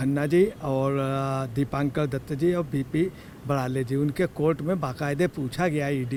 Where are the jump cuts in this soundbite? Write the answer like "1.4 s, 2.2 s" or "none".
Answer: none